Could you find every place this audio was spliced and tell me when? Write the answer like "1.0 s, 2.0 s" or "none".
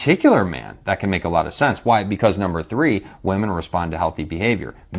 none